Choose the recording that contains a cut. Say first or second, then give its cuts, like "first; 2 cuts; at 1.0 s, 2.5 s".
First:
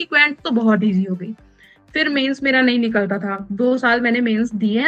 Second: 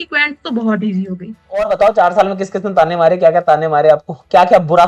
second; 1 cut; at 1.6 s